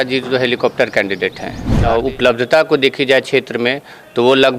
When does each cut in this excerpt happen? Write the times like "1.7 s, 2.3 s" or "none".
1.7 s